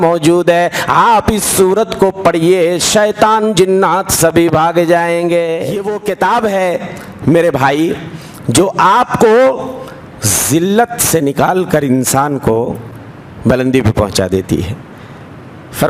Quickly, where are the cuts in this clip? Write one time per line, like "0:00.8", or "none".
0:05.9